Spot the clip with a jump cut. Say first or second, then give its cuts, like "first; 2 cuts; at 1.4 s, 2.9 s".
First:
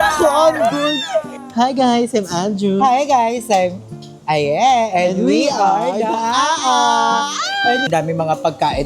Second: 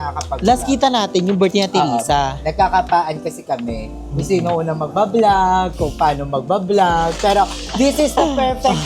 first; 2 cuts; at 1.4 s, 7.9 s